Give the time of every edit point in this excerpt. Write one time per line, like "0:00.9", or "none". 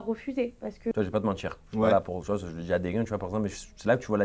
0:00.9